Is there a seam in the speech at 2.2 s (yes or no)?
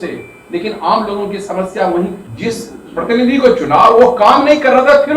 yes